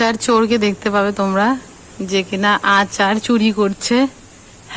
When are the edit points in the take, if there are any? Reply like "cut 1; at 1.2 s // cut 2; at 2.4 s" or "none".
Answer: none